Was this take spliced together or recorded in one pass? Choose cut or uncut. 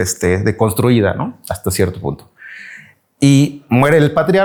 uncut